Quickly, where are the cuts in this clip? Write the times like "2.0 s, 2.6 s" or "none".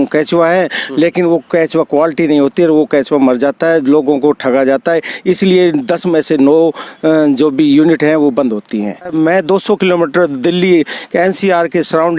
9.1 s